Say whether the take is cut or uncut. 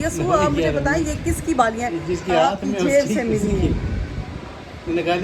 uncut